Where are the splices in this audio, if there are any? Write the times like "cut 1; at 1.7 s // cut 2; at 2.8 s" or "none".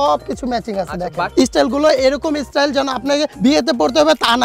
cut 1; at 1.3 s